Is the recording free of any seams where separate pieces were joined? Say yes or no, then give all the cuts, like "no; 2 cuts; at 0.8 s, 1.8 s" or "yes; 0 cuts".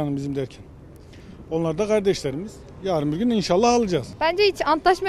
no; 1 cut; at 4.1 s